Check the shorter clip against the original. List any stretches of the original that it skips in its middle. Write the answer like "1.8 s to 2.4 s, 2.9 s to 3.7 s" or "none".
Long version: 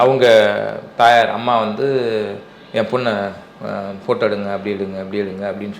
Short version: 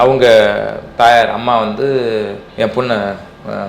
2.4 s to 2.6 s